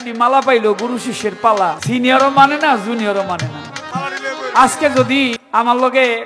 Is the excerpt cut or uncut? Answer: cut